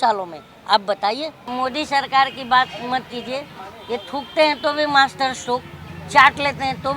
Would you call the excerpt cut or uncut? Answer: cut